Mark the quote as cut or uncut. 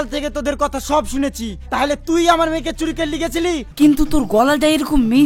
cut